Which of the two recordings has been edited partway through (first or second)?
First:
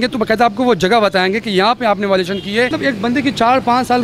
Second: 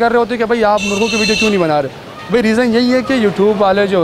first